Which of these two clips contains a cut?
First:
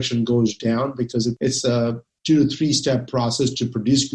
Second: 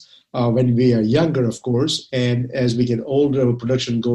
first; 1 cut; at 1.4 s

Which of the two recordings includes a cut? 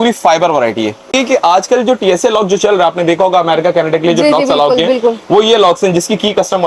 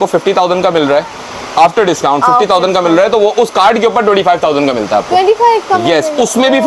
first; 1 cut; at 1.1 s

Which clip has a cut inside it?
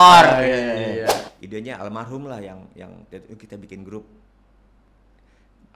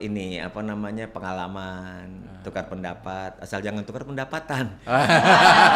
first; 1 cut; at 1.2 s

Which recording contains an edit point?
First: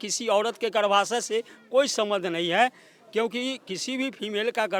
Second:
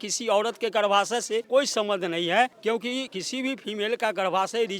second; 2 cuts; at 1.5 s, 2.9 s

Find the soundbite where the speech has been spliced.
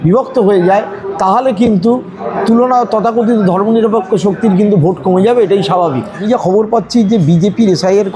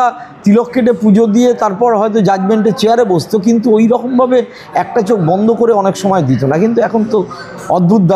first; 1 cut; at 6.2 s

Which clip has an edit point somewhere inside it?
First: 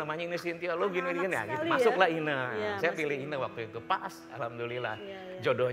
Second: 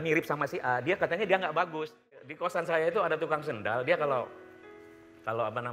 second; 1 cut; at 2.3 s

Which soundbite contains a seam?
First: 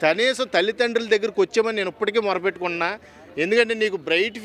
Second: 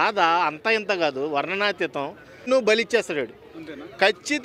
second; 1 cut; at 2.5 s

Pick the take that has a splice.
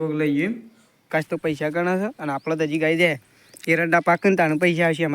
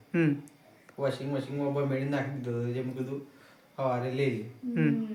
first; 1 cut; at 1.1 s

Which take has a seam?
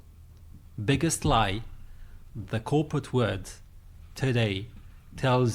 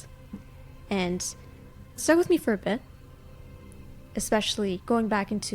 second; 1 cut; at 2.0 s

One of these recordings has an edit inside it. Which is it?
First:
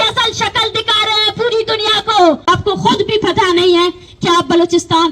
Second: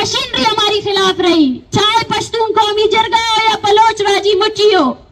first; 1 cut; at 2.4 s

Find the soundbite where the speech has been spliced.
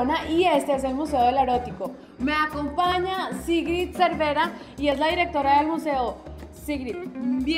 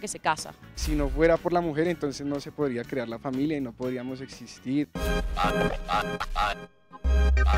second; 1 cut; at 4.9 s

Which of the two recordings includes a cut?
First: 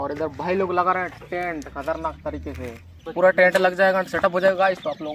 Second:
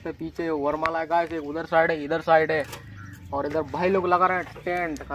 first; 1 cut; at 3.0 s

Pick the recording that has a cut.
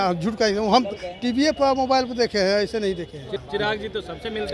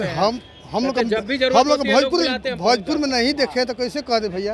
first; 1 cut; at 3.3 s

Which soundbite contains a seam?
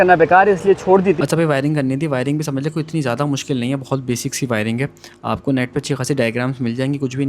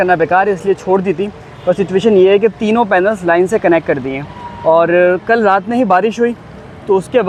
first; 1 cut; at 1.2 s

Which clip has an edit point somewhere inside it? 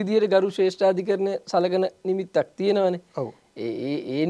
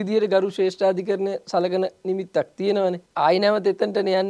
second; 1 cut; at 3.0 s

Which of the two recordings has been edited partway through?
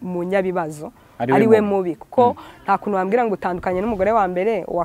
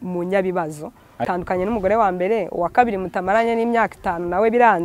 second; 1 cut; at 1.2 s

